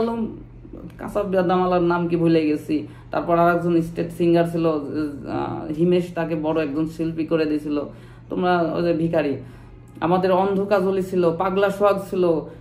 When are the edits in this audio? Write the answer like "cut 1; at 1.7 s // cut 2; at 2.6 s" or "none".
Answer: none